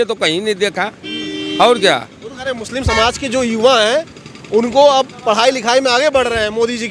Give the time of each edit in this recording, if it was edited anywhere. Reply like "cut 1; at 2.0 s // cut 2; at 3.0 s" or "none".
none